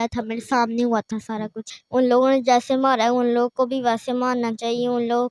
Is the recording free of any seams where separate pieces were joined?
no; 1 cut; at 1.7 s

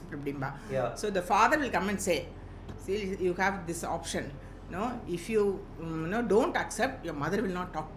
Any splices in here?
no; 0 cuts

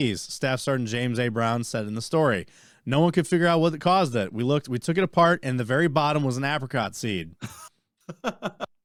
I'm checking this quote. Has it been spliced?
no; 0 cuts

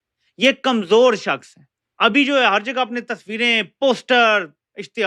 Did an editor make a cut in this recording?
no; 0 cuts

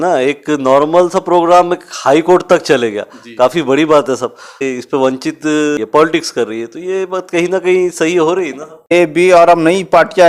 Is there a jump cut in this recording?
yes; 3 cuts; at 4.7 s, 5.8 s, 8.9 s

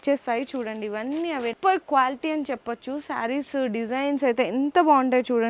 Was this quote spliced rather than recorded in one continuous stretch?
yes; 1 cut; at 1.6 s

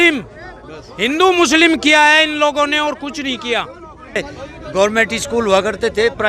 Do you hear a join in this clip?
yes; 1 cut; at 4.2 s

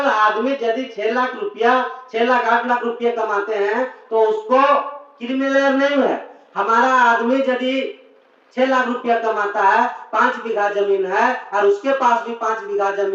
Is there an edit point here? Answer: no; 0 cuts

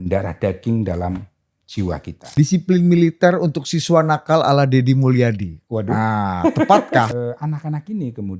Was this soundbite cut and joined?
yes; 2 cuts; at 2.2 s, 7.1 s

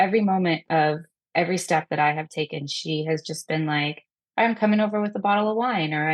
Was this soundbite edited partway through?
no; 0 cuts

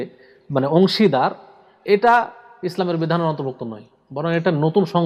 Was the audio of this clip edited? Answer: no; 0 cuts

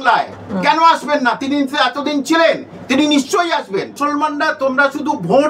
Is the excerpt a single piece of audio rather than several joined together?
no; 1 cut; at 4.0 s

